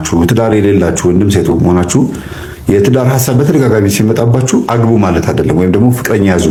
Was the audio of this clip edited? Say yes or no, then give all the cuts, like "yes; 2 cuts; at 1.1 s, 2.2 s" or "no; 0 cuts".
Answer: no; 0 cuts